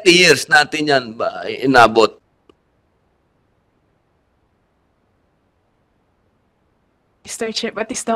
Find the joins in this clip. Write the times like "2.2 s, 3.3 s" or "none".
none